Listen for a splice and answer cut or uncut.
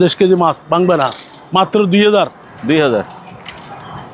uncut